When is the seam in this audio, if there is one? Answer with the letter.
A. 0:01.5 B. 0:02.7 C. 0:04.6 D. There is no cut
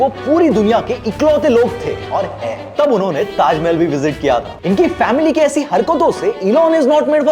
B